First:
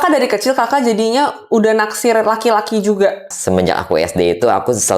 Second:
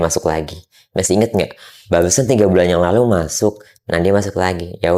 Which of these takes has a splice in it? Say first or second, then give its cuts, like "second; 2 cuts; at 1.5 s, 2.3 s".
first; 1 cut; at 3.3 s